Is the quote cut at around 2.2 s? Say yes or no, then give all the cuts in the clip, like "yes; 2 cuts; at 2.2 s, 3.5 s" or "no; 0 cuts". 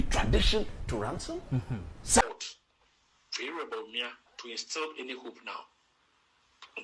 yes; 1 cut; at 2.2 s